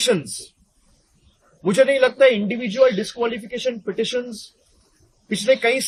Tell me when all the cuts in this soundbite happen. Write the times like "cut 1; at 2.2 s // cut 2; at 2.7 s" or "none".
none